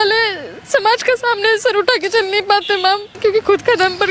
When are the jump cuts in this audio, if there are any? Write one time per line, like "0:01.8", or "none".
0:03.1

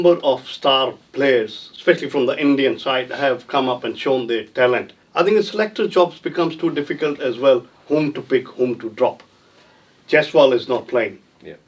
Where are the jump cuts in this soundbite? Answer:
0:05.0

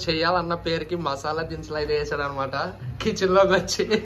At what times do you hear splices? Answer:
none

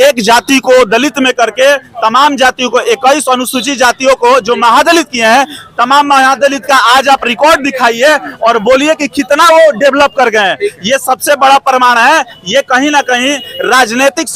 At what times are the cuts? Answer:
none

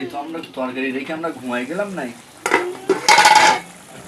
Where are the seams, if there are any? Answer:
none

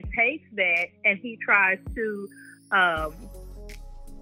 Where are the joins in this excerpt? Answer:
0:03.3

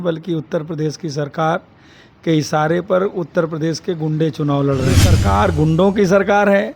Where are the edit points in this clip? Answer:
0:05.1

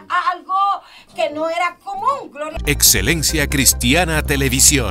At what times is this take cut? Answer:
0:02.6

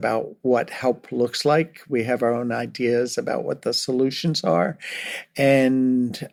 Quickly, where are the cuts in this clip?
none

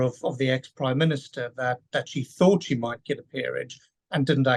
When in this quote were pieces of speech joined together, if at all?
none

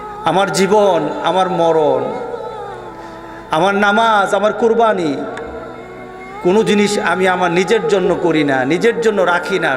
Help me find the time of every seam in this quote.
none

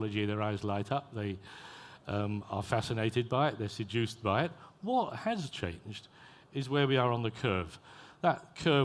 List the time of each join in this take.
0:01.5

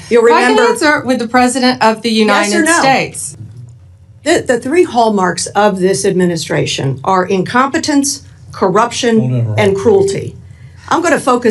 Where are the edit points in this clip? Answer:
0:03.2

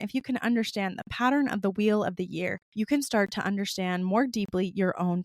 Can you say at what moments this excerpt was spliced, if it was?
0:02.6

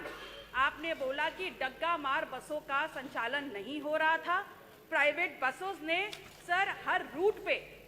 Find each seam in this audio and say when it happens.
none

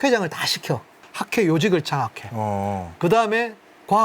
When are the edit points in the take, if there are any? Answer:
0:01.0

